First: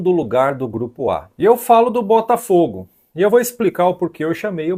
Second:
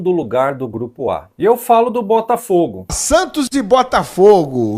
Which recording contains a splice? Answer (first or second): second